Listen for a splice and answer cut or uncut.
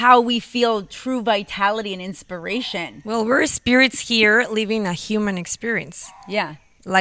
uncut